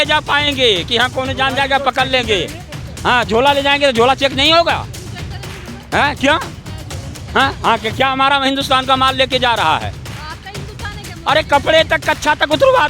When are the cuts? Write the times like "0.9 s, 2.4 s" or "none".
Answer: none